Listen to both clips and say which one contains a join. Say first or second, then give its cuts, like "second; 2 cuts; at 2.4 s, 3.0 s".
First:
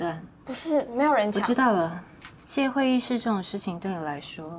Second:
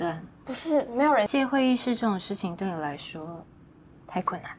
second; 1 cut; at 1.3 s